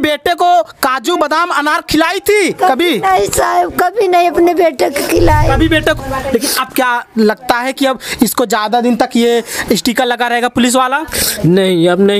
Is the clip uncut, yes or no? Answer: no